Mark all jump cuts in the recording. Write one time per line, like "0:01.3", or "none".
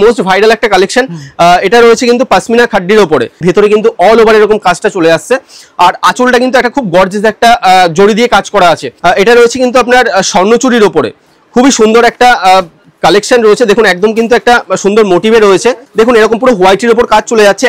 0:03.4
0:08.9
0:15.8